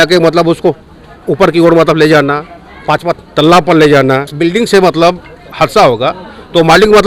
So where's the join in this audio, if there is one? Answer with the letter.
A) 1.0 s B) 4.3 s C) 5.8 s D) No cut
B